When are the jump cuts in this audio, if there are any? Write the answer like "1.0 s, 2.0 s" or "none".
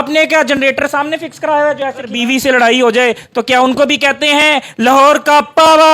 2.1 s